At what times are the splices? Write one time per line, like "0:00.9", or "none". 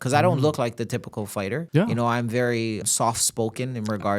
0:01.6
0:02.8